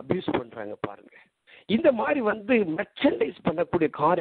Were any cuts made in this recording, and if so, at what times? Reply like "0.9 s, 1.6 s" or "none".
none